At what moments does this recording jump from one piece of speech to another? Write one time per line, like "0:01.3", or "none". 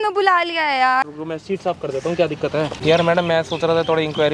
0:01.0
0:02.7